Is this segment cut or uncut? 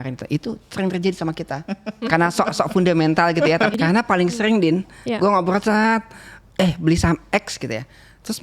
cut